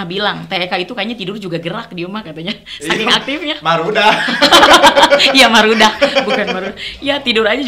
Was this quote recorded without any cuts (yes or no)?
yes